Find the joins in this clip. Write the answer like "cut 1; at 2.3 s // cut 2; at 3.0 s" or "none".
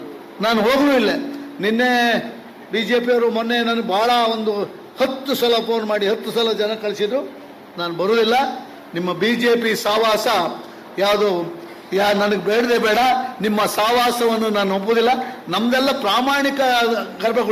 none